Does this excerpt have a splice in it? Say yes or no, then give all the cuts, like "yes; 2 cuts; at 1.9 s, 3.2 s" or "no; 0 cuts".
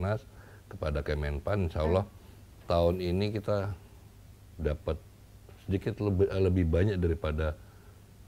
no; 0 cuts